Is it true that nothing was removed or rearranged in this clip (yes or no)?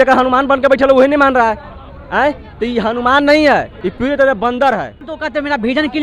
no